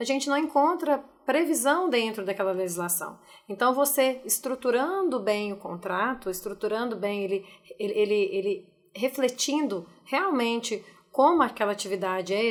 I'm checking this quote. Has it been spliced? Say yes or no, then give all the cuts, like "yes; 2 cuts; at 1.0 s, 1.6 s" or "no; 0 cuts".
no; 0 cuts